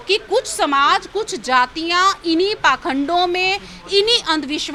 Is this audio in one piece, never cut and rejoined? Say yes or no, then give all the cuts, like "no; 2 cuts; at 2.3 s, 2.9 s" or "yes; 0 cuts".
yes; 0 cuts